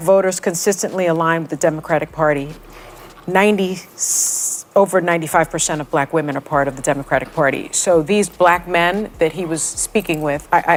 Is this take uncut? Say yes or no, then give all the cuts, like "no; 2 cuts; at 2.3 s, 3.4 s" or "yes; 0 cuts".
yes; 0 cuts